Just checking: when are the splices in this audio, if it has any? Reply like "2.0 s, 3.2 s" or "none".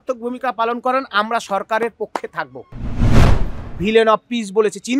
3.2 s